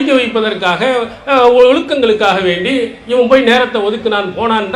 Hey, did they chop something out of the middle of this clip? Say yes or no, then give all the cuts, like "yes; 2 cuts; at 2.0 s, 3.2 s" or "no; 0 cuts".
no; 0 cuts